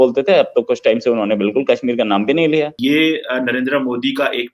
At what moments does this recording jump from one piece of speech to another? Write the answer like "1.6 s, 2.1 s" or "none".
2.7 s